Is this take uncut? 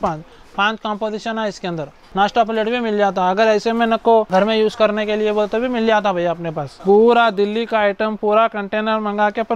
no; 3 cuts; at 2.0 s, 4.3 s, 6.7 s

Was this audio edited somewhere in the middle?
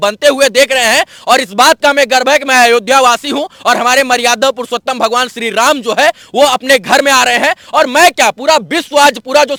no; 0 cuts

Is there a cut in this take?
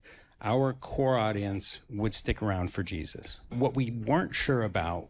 yes; 1 cut; at 3.5 s

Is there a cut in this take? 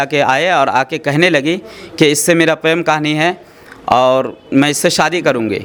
no; 0 cuts

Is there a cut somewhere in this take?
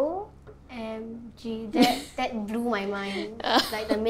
no; 0 cuts

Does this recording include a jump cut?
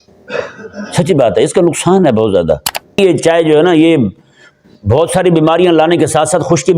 yes; 1 cut; at 3.0 s

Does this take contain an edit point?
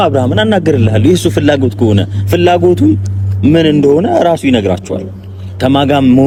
no; 0 cuts

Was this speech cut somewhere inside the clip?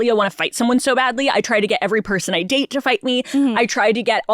no; 0 cuts

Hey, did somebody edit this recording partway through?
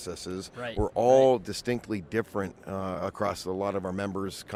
no; 0 cuts

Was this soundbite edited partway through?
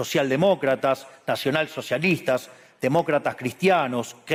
no; 0 cuts

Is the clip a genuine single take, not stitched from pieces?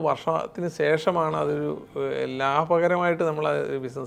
yes; 0 cuts

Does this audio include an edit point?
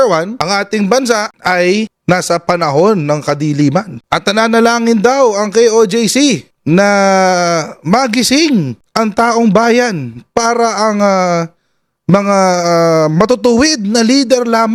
no; 0 cuts

